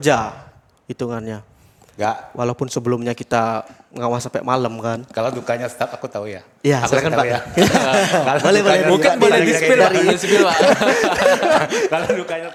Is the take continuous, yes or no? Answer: yes